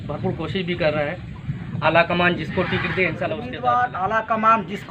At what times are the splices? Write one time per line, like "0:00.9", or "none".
0:03.5